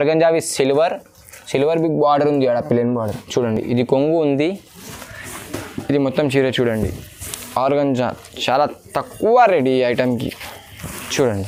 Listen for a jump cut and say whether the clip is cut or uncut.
uncut